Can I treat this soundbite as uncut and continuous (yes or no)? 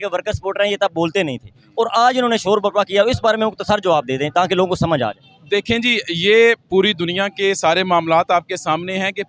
yes